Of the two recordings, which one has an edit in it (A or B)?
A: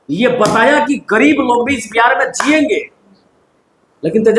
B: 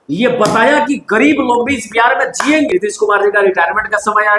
B